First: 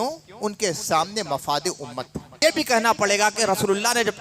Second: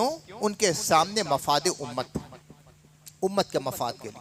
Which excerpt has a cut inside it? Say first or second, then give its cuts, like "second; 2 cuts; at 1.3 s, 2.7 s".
first; 1 cut; at 2.3 s